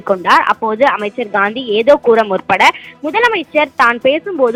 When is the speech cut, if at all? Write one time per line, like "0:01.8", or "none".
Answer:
none